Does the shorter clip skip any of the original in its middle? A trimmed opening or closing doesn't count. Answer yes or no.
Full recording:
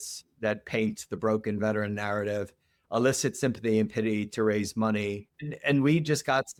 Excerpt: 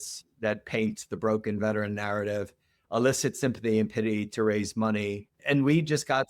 yes